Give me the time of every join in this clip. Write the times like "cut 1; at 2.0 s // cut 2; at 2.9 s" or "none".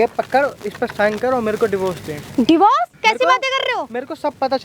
cut 1; at 2.9 s

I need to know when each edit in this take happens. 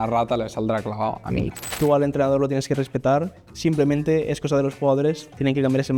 cut 1; at 1.6 s // cut 2; at 3.4 s

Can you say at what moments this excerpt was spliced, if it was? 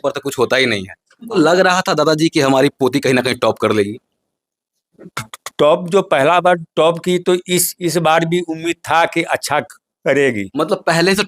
cut 1; at 1.4 s

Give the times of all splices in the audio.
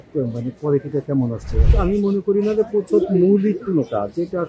cut 1; at 1.7 s

